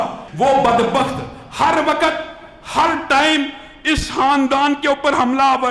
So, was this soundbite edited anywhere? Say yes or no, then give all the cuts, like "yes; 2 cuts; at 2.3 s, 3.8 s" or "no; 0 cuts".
no; 0 cuts